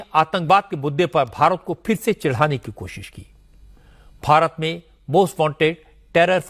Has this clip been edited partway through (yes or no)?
no